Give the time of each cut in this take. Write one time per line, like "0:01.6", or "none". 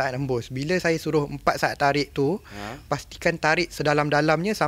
none